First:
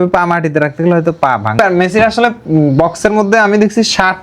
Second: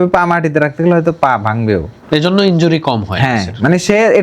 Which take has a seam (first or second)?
first